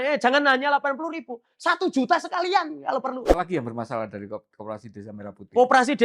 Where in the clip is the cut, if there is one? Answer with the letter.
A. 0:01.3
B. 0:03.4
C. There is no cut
B